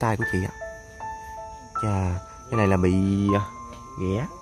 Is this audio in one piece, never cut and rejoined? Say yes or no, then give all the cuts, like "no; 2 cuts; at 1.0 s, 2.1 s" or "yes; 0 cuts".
yes; 0 cuts